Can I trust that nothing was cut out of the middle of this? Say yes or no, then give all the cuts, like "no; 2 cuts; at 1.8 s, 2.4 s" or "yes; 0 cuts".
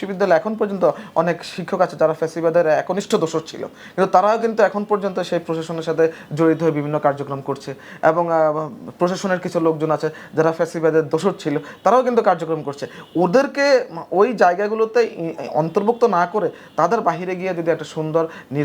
yes; 0 cuts